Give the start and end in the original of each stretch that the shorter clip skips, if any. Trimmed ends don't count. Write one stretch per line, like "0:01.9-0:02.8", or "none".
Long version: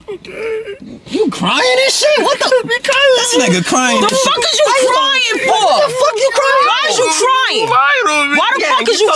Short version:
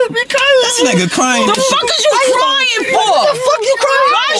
none